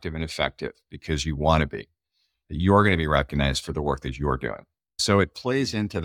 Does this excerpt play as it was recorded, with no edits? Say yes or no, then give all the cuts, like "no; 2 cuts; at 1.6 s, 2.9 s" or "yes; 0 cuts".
no; 1 cut; at 5.0 s